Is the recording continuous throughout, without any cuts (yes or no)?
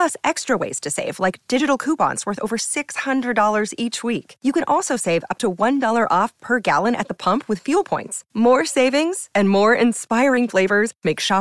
yes